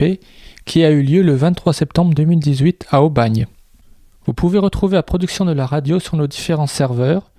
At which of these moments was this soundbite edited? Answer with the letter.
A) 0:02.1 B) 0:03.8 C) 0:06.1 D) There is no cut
B